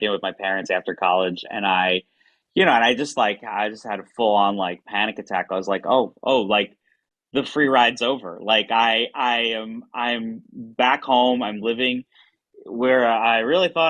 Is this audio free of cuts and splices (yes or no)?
yes